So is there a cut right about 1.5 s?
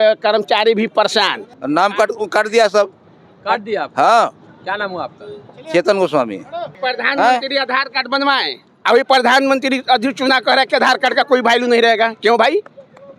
yes; 2 cuts; at 1.5 s, 6.8 s

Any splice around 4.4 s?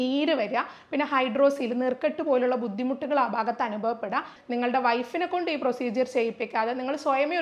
yes; 1 cut; at 4.4 s

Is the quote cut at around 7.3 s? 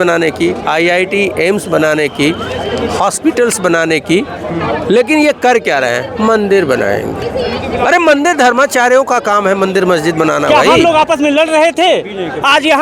no; 1 cut; at 10.7 s

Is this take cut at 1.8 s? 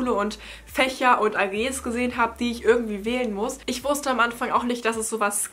no; 1 cut; at 3.7 s

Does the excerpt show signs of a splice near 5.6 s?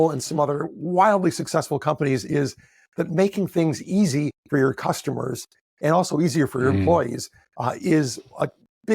no; 0 cuts

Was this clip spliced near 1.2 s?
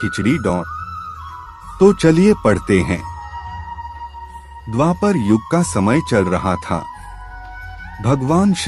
no; 2 cuts; at 3.1 s, 4.6 s

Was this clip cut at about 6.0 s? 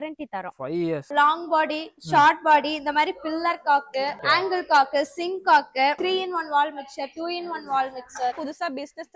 yes; 4 cuts; at 1.1 s, 4.2 s, 6.0 s, 8.4 s

